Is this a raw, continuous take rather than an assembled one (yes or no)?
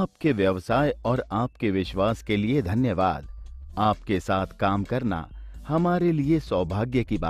yes